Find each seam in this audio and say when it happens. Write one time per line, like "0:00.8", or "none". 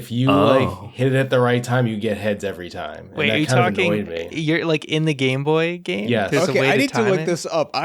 0:06.5